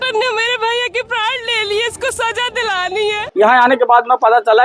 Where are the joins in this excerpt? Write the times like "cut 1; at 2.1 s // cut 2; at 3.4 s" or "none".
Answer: cut 1; at 3.2 s